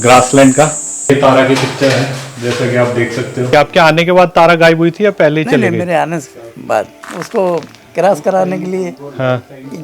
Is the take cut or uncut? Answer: cut